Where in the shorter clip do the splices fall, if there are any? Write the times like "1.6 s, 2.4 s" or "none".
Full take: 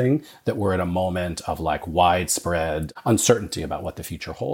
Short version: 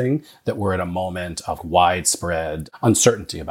1.6 s